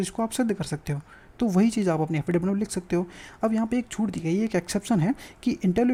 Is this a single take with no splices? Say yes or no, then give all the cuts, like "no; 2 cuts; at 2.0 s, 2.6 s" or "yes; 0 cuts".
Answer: yes; 0 cuts